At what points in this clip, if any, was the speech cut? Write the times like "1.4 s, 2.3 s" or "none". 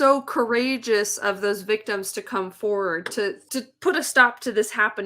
3.4 s